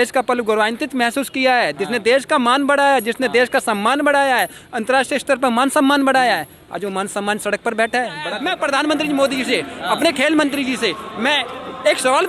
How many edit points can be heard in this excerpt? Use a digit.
1